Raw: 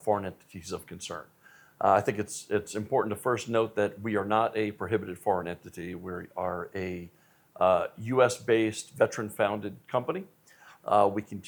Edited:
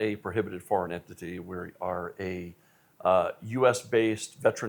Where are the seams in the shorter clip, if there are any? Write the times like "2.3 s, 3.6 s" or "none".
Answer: none